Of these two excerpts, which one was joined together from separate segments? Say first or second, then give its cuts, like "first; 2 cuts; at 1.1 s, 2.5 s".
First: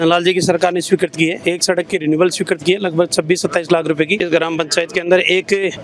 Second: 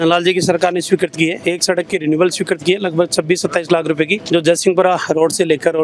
first; 1 cut; at 4.2 s